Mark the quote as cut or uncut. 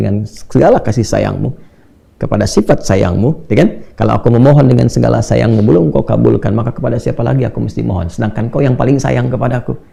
uncut